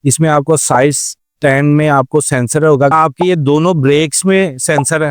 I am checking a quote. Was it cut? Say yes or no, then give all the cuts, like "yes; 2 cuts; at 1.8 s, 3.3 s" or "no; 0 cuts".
yes; 1 cut; at 2.9 s